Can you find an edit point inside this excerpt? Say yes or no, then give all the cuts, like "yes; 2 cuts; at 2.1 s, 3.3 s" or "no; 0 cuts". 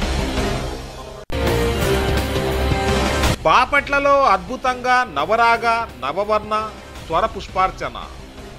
no; 0 cuts